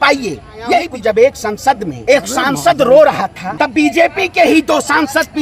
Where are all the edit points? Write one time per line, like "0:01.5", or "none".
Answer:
0:00.9
0:01.9
0:03.4

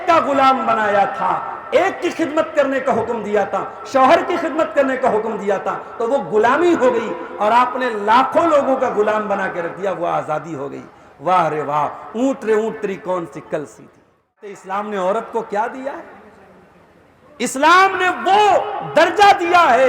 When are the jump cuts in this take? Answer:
0:14.6

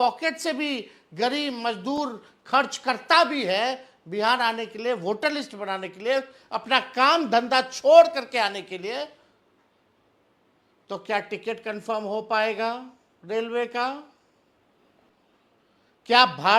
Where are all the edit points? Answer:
0:15.0

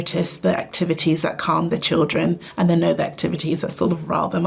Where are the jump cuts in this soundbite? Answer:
0:02.5

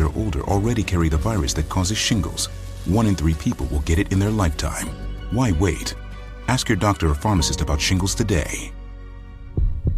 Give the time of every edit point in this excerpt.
0:08.7

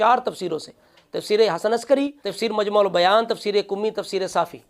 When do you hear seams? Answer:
0:02.2

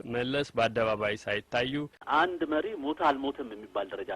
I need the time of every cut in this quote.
0:02.0

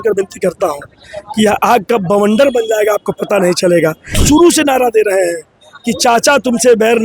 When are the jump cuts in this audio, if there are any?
0:04.2

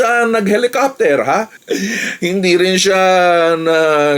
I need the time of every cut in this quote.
none

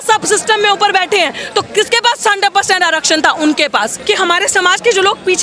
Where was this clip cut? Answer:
0:03.9

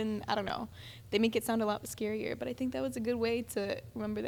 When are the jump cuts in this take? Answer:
none

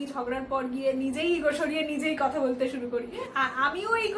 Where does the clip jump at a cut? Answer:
0:03.2

